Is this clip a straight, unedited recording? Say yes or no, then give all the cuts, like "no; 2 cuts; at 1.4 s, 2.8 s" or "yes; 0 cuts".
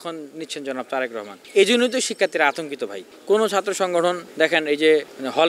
yes; 0 cuts